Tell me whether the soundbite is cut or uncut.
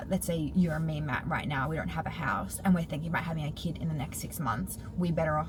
uncut